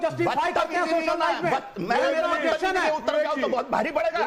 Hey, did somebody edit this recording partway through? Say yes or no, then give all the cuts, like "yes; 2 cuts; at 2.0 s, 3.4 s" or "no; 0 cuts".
no; 0 cuts